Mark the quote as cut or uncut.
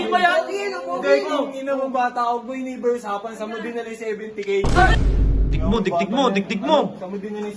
cut